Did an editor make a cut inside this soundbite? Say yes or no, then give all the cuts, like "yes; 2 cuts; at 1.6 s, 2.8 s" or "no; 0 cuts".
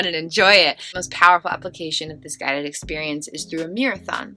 yes; 1 cut; at 0.9 s